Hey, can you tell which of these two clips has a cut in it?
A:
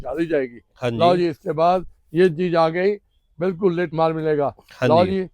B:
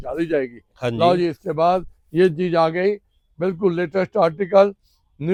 A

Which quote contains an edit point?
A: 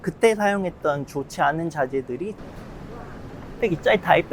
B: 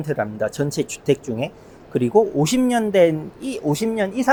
A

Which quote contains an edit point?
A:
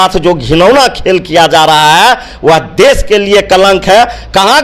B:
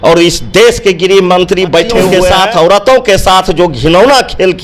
B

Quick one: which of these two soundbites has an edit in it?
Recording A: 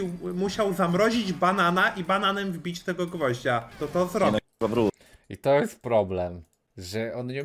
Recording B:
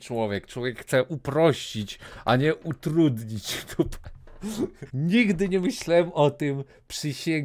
B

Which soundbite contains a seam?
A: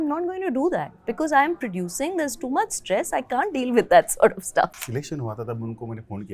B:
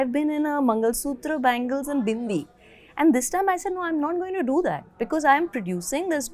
A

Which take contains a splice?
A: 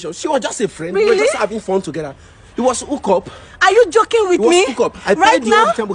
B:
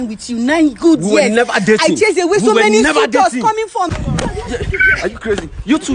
B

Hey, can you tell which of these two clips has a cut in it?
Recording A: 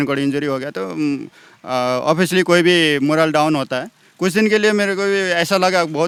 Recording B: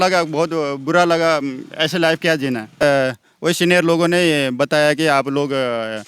B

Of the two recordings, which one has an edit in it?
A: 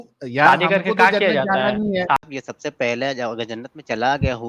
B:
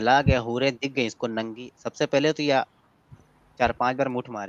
A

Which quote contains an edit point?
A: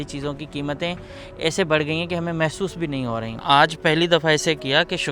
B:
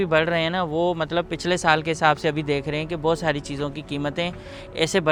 A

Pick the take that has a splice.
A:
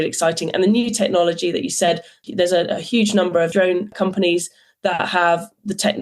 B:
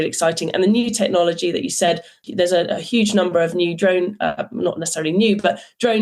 A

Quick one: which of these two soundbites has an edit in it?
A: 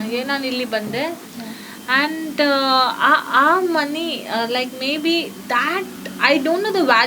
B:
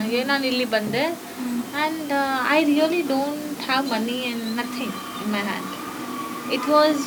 A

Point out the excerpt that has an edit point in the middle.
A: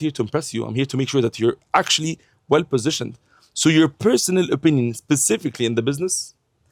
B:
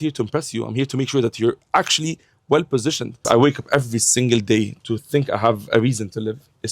B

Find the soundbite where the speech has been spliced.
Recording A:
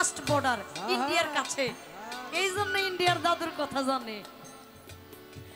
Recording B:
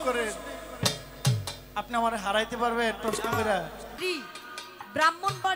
B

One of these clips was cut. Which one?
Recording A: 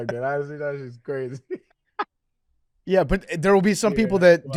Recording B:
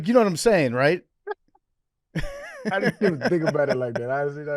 B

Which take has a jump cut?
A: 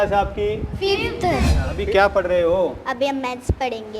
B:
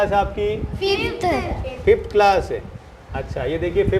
A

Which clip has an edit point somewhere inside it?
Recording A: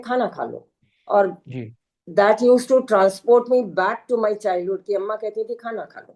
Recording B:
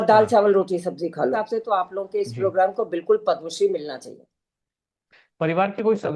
B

